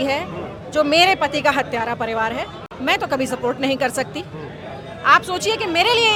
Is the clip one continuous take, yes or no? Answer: yes